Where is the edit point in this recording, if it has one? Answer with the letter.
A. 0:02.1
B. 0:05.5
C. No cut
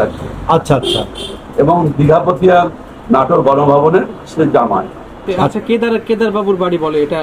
B